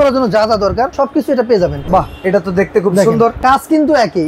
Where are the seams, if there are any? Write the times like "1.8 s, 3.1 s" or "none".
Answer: 0.9 s, 1.8 s, 3.4 s